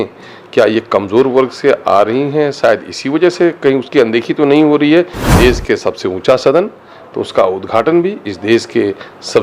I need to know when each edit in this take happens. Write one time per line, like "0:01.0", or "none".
0:05.2